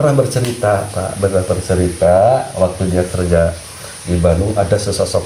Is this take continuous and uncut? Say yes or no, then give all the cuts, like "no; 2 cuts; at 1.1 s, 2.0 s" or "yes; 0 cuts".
yes; 0 cuts